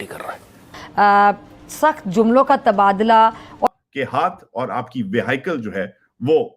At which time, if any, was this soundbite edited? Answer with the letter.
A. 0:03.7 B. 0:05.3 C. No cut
A